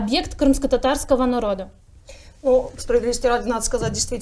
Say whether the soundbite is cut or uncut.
uncut